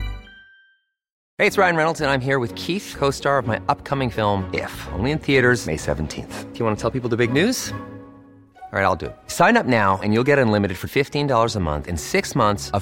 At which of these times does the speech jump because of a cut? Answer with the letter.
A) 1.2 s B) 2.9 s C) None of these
A